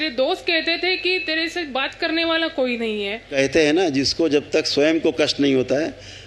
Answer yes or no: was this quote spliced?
yes